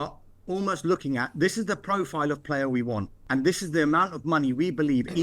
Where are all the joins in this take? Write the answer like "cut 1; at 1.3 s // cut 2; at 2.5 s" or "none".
cut 1; at 3.2 s